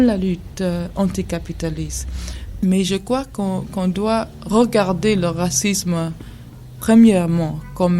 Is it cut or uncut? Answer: cut